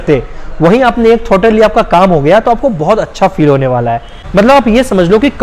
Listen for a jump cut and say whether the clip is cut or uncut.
cut